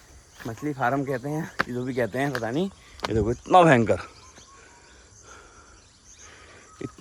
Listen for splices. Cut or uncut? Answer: uncut